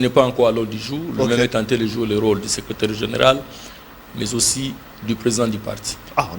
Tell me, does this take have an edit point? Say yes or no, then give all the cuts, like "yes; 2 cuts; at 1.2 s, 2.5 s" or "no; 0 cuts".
no; 0 cuts